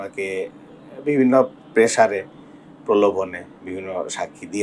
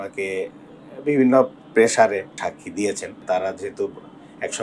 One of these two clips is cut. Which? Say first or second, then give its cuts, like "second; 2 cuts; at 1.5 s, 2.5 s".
second; 2 cuts; at 2.4 s, 3.1 s